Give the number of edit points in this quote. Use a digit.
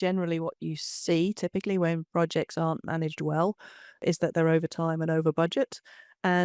1